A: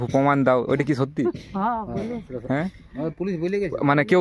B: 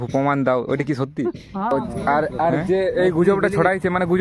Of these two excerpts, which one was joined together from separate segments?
B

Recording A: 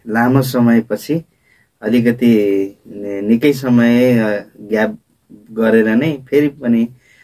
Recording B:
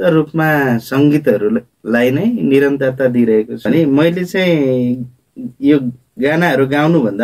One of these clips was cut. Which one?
B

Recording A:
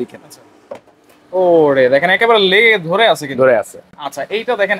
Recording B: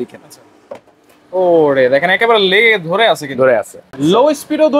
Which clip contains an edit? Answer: B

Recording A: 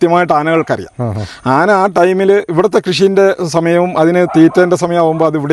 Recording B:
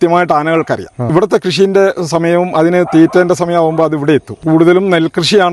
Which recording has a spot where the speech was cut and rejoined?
B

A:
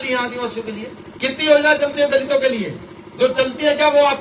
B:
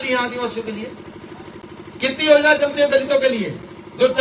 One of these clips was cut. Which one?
A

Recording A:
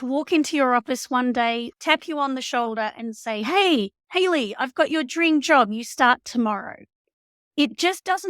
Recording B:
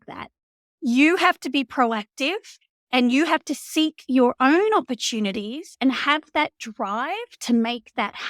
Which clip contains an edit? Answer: A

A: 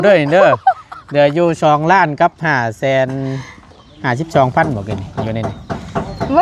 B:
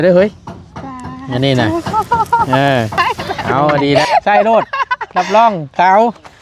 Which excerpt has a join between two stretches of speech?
B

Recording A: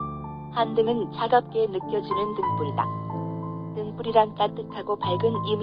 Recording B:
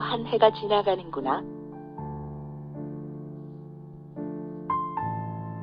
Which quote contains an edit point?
B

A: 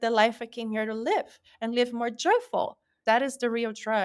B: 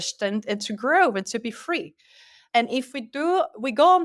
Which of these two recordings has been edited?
A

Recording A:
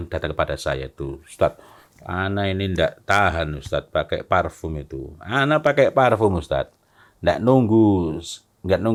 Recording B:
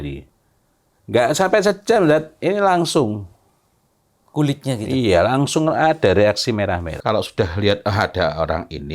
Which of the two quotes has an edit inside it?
B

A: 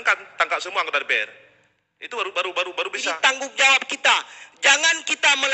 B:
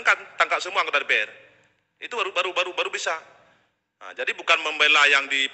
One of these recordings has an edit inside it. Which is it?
A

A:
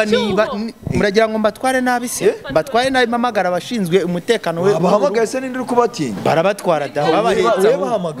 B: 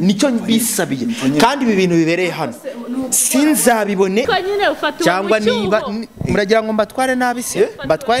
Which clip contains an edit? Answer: B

